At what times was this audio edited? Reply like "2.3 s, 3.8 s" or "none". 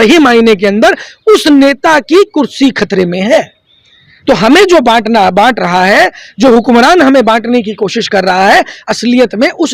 none